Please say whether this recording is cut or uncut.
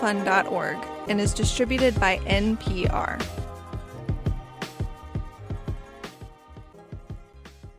uncut